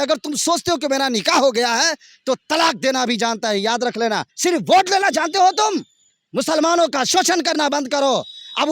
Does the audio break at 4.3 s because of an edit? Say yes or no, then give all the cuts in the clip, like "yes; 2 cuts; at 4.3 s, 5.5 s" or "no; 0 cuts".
yes; 1 cut; at 4.3 s